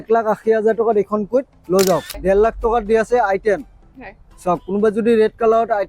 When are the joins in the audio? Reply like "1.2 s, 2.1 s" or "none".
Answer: 2.1 s